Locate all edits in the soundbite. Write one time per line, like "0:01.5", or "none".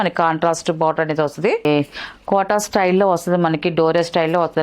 0:01.7